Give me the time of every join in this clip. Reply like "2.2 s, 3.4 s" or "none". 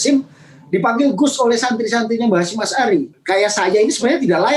3.2 s